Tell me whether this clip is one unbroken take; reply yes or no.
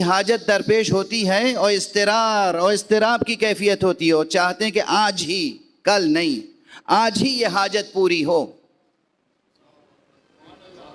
yes